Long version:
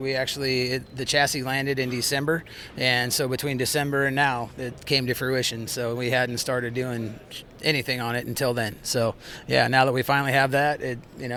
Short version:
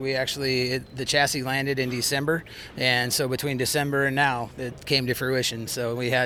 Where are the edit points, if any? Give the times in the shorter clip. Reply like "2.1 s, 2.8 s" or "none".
none